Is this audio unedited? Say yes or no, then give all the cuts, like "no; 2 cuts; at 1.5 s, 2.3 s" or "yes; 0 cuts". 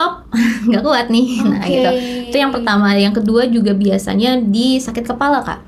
yes; 0 cuts